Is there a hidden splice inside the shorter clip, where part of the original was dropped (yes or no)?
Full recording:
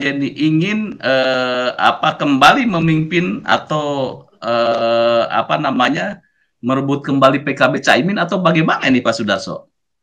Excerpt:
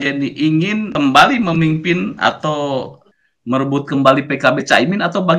yes